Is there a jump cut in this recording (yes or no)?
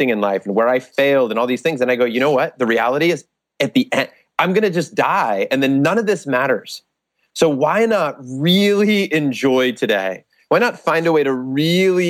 no